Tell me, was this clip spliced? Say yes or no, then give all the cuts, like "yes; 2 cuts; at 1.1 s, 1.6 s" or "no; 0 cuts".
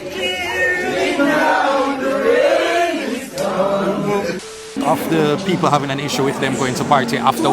yes; 1 cut; at 4.5 s